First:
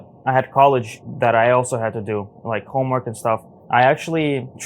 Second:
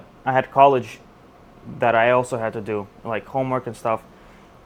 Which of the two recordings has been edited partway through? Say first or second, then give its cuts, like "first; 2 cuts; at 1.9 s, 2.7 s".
first; 2 cuts; at 1.0 s, 3.5 s